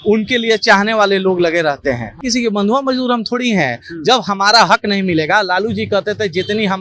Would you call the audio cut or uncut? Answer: cut